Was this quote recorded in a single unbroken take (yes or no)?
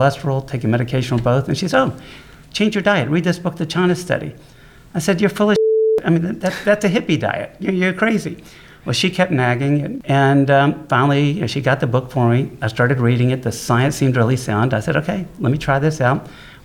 no